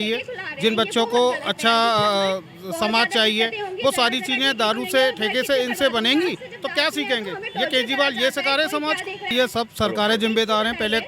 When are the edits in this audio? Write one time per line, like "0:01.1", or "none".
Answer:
0:06.5
0:09.3